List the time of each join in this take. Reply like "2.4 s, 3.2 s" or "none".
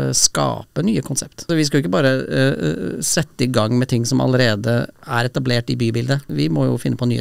1.5 s, 5.0 s, 6.3 s